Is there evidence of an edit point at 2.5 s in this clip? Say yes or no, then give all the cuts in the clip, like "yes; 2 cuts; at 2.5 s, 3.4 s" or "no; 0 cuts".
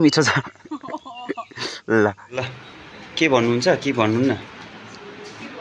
yes; 1 cut; at 2.5 s